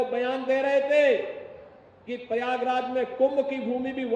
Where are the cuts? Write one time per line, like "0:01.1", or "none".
none